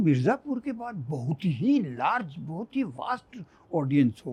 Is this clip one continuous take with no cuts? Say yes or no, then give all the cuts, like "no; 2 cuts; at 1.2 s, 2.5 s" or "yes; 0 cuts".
yes; 0 cuts